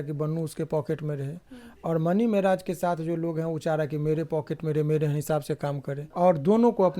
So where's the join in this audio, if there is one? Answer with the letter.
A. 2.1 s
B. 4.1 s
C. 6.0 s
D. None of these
C